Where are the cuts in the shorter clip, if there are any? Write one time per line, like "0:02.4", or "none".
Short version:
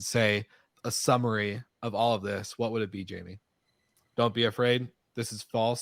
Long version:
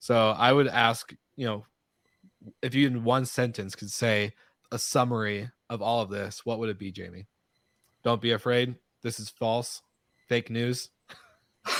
none